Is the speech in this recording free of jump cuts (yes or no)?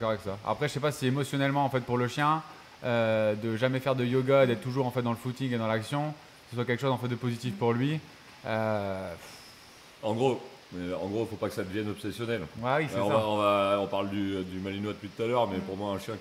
yes